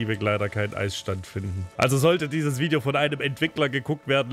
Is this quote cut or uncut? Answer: cut